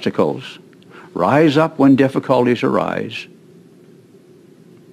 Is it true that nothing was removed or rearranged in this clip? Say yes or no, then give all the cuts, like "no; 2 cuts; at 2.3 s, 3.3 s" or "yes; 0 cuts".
yes; 0 cuts